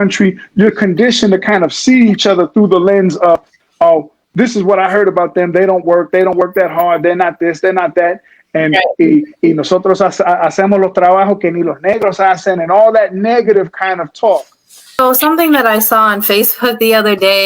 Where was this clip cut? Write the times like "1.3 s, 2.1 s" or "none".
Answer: 15.0 s